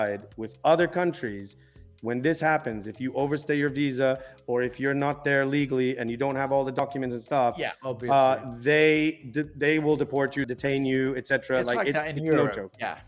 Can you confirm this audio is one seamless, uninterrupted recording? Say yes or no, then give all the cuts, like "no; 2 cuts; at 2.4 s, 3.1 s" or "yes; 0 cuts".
no; 1 cut; at 10.4 s